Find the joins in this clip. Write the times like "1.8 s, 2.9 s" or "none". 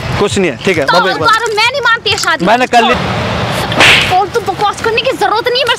2.9 s